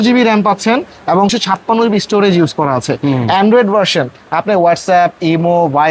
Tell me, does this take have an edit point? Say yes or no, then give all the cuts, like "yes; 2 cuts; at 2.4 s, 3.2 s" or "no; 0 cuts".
yes; 1 cut; at 1.4 s